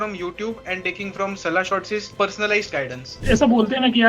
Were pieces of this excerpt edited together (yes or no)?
yes